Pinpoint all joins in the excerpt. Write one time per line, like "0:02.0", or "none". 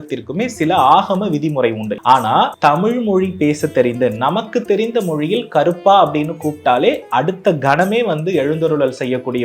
0:01.9
0:02.5

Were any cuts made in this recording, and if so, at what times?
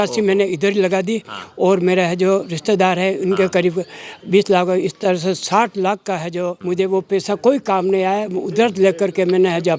0:06.6

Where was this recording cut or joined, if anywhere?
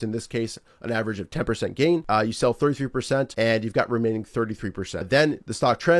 0:02.0
0:03.3
0:05.0

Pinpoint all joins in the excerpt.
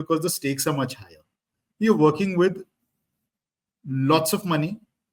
none

